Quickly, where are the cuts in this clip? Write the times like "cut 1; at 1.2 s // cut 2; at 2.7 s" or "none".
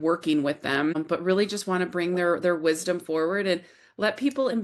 cut 1; at 0.9 s